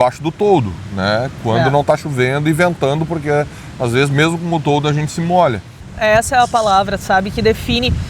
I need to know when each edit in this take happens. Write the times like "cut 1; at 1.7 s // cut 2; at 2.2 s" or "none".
cut 1; at 5.8 s